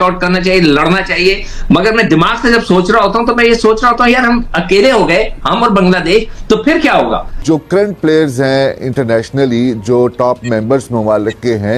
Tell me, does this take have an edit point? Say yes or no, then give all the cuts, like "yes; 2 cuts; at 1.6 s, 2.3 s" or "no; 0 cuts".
yes; 1 cut; at 7.4 s